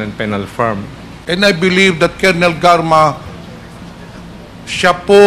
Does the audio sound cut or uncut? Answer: cut